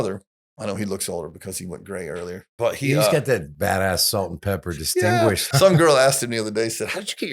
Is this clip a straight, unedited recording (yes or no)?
no